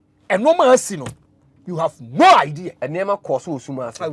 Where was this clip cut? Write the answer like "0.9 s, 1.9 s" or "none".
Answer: none